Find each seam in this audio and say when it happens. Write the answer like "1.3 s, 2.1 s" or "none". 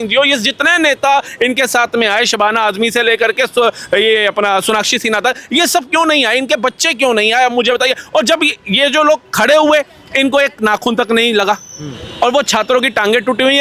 none